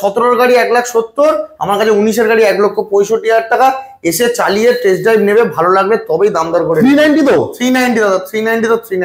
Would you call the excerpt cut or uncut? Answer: uncut